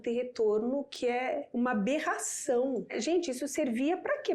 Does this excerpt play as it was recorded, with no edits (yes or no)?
no